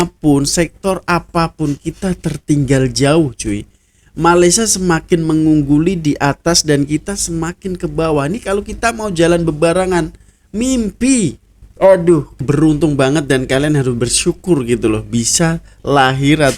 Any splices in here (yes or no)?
yes